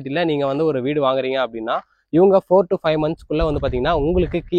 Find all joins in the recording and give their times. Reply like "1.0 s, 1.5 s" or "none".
none